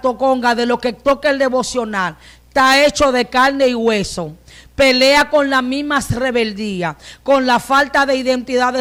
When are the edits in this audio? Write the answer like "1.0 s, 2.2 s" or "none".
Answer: none

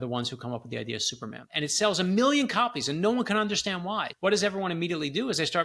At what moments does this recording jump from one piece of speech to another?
1.4 s, 4.1 s

